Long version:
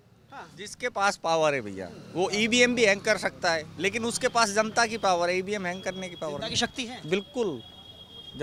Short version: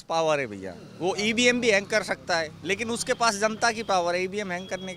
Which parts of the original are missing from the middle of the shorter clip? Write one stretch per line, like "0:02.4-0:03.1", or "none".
none

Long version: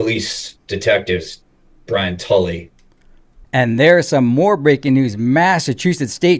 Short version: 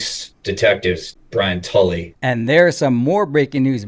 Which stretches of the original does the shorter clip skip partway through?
0:01.4-0:01.7
0:02.7-0:03.4

